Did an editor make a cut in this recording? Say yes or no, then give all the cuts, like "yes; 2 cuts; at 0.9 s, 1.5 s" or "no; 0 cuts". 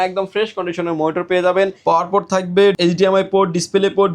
yes; 2 cuts; at 1.8 s, 2.8 s